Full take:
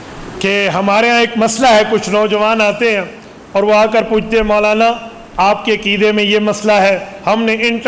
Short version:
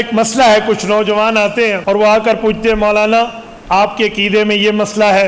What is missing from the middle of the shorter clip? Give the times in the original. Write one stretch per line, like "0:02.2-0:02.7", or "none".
0:03.0-0:03.5